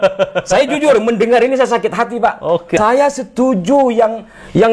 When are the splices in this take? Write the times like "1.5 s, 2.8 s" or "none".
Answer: 2.8 s